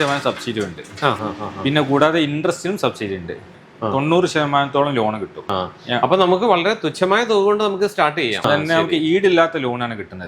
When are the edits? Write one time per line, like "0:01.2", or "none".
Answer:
0:03.6
0:05.5
0:08.4